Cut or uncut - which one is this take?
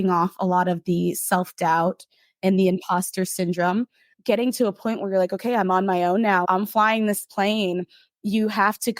cut